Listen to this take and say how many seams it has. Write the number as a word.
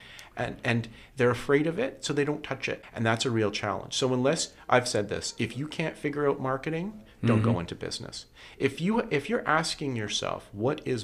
one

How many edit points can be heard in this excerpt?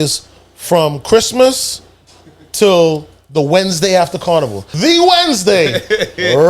one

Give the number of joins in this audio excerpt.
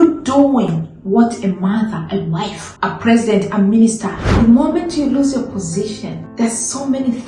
three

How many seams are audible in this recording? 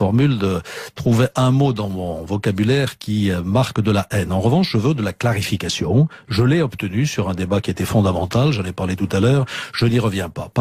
zero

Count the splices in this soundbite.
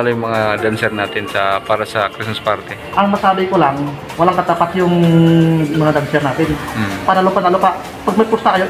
zero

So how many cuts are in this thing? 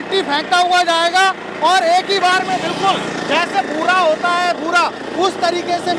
zero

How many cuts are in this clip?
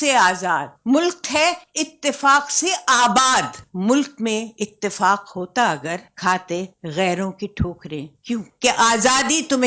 one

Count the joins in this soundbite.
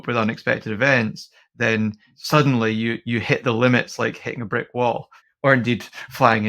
one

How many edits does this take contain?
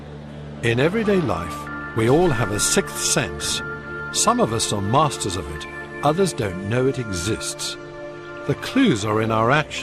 zero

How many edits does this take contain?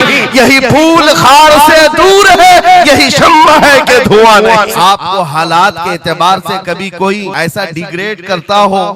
two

